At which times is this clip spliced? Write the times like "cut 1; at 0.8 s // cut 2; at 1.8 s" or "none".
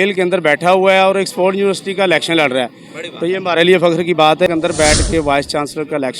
cut 1; at 4.5 s